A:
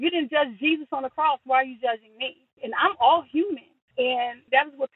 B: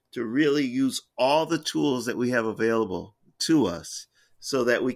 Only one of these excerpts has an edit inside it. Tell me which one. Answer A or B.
A